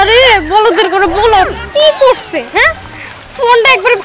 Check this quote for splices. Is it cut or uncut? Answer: uncut